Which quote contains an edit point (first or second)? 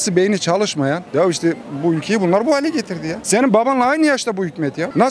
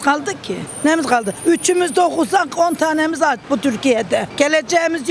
first